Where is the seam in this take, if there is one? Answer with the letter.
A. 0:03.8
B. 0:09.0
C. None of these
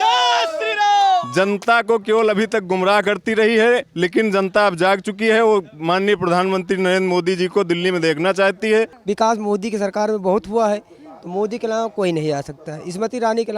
B